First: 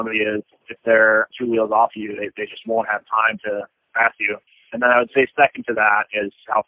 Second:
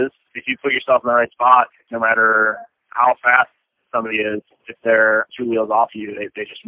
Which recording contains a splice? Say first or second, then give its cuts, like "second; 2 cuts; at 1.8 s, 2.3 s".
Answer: first; 1 cut; at 4.5 s